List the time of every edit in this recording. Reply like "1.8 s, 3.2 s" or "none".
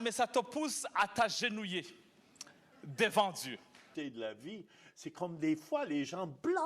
3.9 s